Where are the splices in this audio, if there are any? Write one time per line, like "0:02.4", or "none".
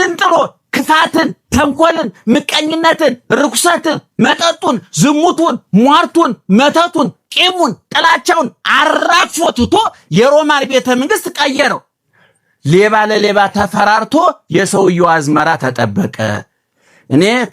0:12.0